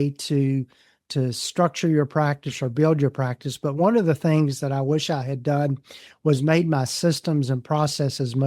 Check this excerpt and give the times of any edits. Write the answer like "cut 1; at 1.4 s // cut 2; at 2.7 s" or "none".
none